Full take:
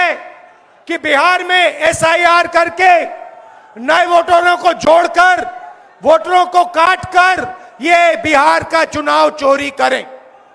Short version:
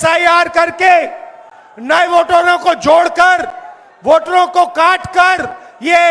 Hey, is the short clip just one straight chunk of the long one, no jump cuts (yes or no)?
yes